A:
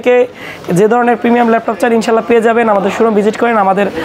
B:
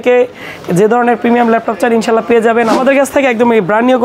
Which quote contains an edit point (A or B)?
B